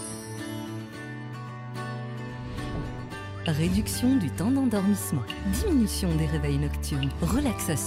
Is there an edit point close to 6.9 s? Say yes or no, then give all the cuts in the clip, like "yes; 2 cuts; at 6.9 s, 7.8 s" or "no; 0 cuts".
no; 0 cuts